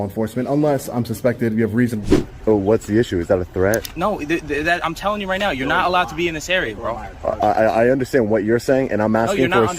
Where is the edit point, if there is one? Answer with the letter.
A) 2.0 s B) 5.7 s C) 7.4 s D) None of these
A